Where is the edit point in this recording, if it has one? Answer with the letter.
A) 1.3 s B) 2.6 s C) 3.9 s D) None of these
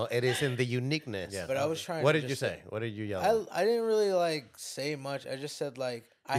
A